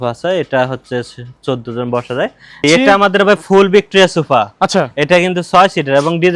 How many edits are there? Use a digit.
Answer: 1